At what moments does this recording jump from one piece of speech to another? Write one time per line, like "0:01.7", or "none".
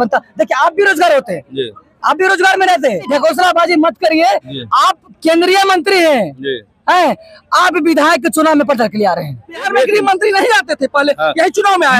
0:03.1
0:09.7